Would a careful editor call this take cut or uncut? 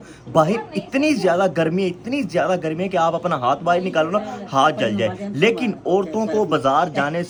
uncut